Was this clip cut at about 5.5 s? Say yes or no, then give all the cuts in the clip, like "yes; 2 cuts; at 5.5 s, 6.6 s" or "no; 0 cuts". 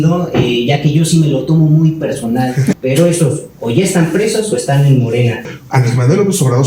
yes; 2 cuts; at 2.7 s, 5.5 s